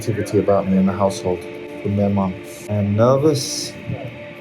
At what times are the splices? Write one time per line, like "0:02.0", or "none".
0:01.7
0:02.5